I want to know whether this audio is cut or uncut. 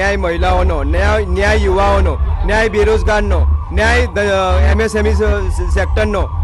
uncut